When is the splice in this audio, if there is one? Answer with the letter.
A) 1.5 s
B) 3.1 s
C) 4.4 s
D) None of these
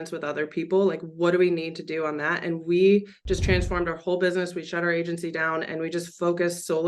D